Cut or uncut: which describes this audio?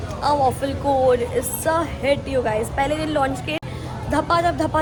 uncut